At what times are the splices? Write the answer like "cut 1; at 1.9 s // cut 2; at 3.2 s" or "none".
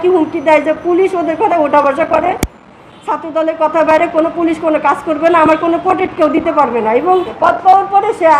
cut 1; at 7.3 s